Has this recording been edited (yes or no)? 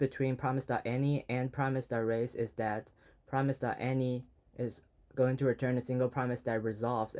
no